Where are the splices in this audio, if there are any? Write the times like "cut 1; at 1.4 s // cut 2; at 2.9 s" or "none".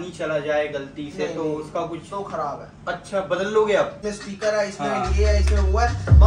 cut 1; at 4.0 s